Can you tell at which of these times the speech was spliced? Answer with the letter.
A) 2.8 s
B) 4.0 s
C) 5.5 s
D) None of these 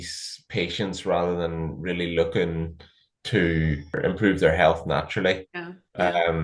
B